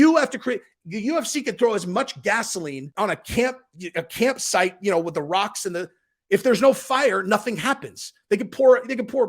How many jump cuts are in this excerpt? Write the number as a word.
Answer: one